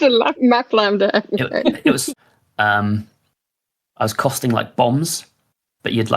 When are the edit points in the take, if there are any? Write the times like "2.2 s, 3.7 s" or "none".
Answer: 2.0 s